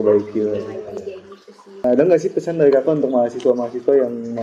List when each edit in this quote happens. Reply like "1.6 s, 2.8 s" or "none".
1.8 s